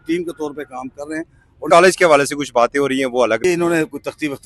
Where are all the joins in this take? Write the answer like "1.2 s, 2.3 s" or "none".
1.7 s, 3.4 s